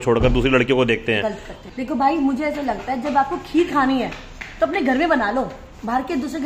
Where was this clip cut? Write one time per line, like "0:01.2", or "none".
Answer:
0:01.6